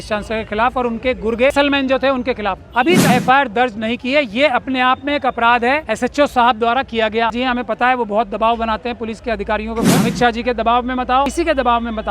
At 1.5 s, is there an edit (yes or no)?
yes